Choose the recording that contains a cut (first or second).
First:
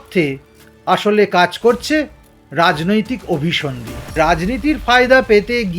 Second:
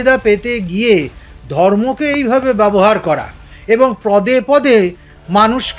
first